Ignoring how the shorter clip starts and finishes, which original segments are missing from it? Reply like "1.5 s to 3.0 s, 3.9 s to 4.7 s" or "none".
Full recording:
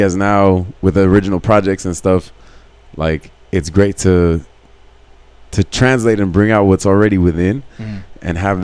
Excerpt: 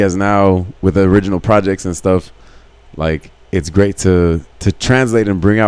4.5 s to 5.4 s